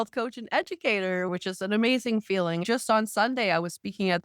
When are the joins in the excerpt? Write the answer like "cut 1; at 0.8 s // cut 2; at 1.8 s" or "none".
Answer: cut 1; at 1.3 s // cut 2; at 2.6 s